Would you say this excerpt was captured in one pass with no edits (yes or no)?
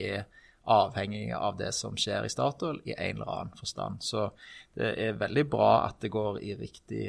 yes